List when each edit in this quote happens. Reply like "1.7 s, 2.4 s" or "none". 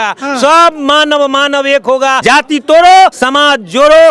2.2 s, 3.2 s